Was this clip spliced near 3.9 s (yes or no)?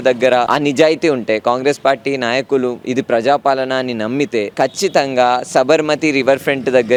no